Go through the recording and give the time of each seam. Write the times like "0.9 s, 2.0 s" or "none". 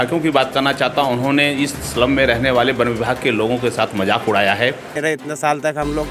4.9 s